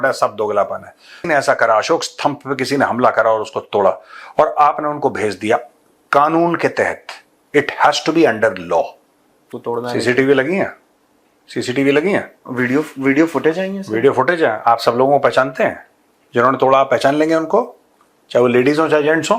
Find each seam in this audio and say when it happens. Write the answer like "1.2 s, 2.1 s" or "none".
1.2 s, 9.5 s